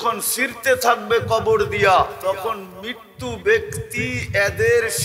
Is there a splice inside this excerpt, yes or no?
yes